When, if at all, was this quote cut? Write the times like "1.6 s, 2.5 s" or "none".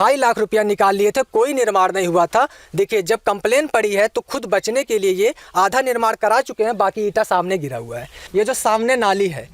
8.2 s